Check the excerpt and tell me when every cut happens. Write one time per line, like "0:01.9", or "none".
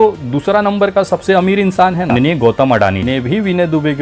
0:02.1
0:03.0